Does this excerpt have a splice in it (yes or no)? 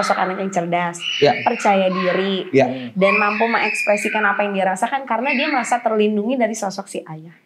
no